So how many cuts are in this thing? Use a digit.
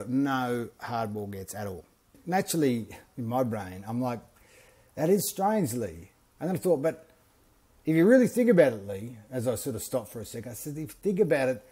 1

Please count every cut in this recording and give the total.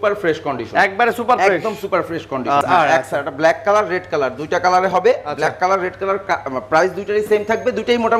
1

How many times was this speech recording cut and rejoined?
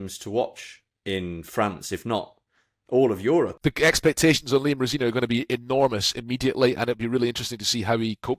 1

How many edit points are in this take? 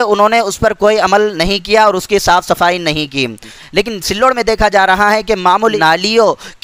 2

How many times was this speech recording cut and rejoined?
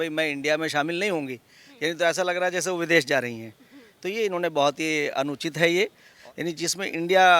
1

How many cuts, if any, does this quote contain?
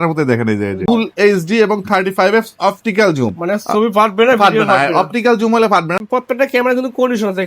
2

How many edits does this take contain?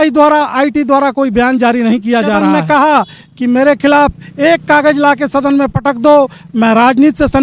1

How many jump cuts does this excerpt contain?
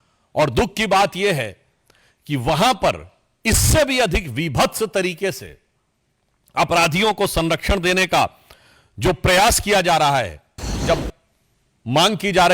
1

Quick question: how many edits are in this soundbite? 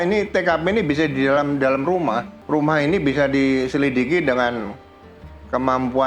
1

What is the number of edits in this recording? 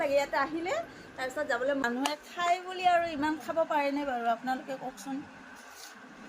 1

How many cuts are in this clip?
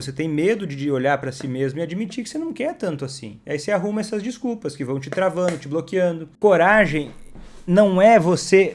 2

